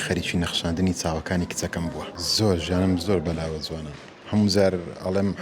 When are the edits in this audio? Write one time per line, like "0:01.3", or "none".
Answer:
0:02.2